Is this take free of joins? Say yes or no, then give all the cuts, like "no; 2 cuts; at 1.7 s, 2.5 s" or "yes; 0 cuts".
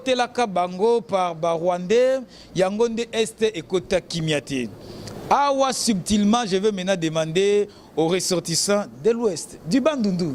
yes; 0 cuts